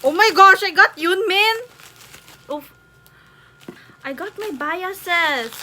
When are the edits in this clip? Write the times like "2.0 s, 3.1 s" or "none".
3.9 s